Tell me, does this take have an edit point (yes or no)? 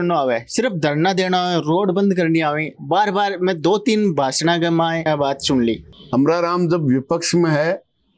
yes